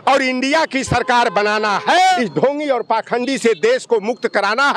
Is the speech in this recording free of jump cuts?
no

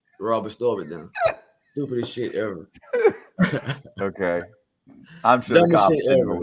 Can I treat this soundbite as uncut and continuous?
yes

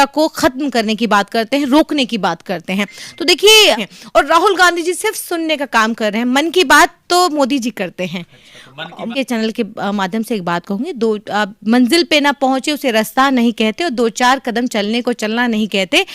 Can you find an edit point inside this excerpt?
yes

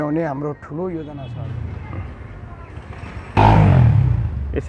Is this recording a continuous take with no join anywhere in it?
no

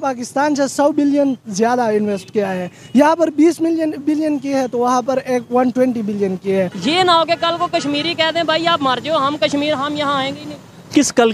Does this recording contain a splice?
yes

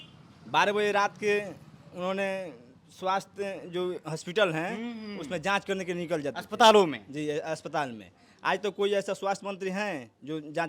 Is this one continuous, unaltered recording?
yes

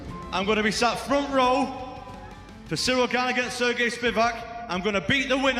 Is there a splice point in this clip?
no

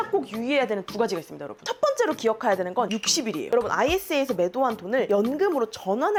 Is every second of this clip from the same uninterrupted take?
yes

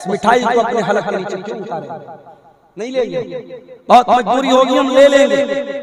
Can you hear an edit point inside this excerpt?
no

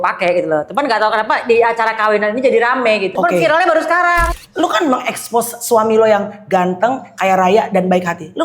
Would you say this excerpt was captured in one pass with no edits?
no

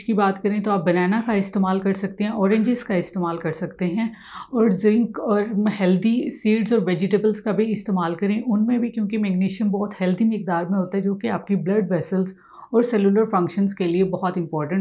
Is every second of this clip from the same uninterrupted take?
yes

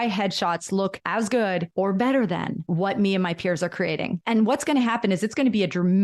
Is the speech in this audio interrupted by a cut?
yes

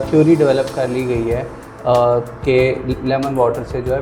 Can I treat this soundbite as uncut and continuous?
yes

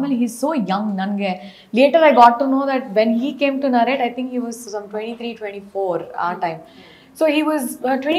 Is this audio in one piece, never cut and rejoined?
yes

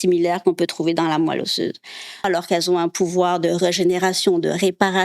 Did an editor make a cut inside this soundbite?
yes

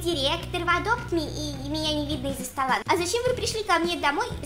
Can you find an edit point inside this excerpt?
yes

